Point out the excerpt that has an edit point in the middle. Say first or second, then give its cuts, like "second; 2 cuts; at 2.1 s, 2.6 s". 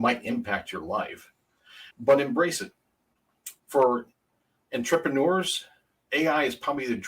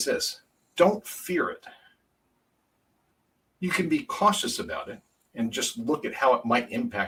first; 1 cut; at 3.6 s